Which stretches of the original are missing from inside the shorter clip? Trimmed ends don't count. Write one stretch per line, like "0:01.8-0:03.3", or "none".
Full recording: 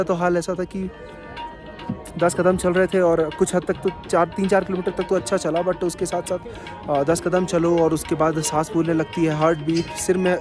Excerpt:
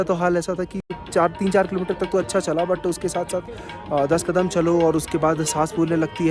0:01.0-0:04.0